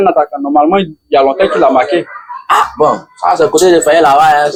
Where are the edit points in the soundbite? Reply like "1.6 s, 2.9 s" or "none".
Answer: none